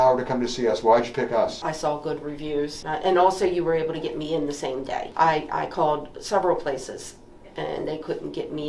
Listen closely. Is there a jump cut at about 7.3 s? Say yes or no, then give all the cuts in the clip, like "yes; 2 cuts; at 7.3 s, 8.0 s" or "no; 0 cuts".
no; 3 cuts; at 1.6 s, 2.8 s, 5.1 s